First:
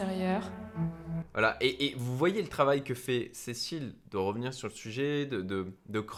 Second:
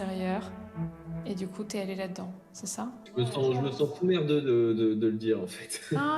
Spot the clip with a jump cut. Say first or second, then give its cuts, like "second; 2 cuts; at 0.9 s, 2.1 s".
second; 2 cuts; at 1.2 s, 5.0 s